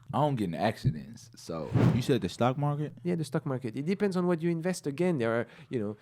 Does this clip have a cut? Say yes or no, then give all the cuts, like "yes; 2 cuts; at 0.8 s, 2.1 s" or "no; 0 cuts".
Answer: yes; 1 cut; at 1.8 s